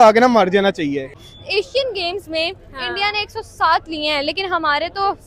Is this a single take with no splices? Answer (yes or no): no